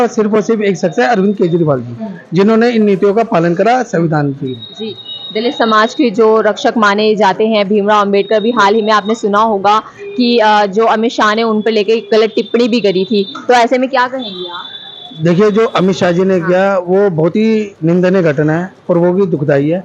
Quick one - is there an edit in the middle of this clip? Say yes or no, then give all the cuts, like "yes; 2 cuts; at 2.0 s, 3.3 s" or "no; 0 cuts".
no; 0 cuts